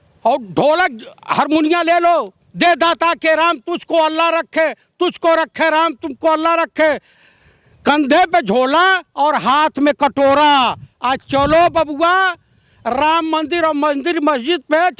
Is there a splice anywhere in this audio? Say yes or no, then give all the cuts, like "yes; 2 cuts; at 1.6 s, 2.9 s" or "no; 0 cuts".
no; 0 cuts